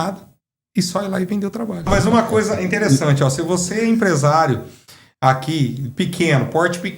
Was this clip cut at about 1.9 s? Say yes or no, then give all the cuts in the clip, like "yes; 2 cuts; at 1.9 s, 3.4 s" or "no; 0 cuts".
yes; 1 cut; at 1.9 s